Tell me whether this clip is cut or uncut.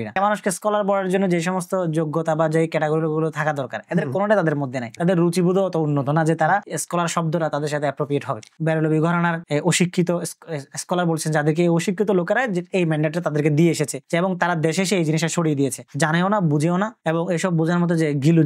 cut